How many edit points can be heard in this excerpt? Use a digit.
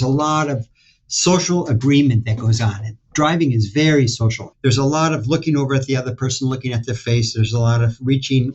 1